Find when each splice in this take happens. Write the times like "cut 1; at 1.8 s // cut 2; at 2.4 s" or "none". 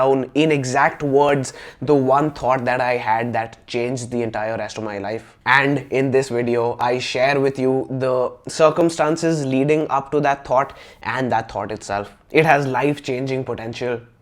cut 1; at 5.3 s // cut 2; at 12.2 s